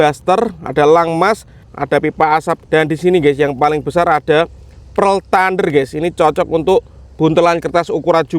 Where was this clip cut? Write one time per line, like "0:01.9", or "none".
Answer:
0:01.7
0:02.6